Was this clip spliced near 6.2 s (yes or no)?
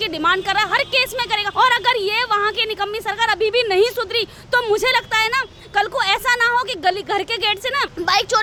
no